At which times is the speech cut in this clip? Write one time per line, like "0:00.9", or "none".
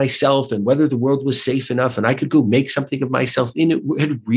none

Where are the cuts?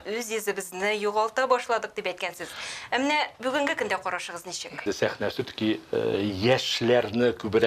0:04.8

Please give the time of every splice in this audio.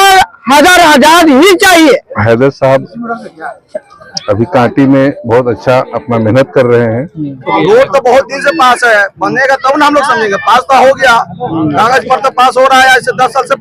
0:02.1
0:07.4

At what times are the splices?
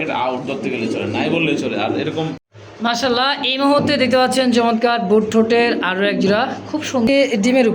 0:02.5
0:07.1

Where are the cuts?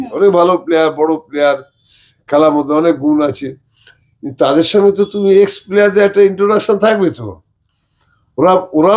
none

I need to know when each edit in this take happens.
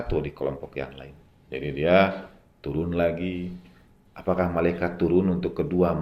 none

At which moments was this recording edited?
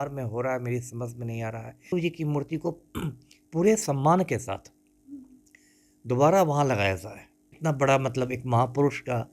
0:01.9
0:07.5

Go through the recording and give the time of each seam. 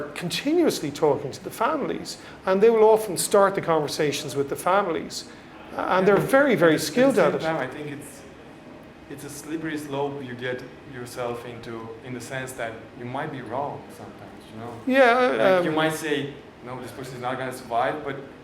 none

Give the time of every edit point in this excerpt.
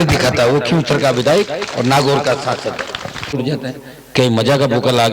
0:03.4

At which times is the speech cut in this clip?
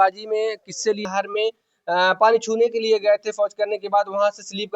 0:01.0

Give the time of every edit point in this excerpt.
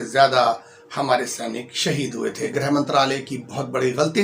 0:02.5

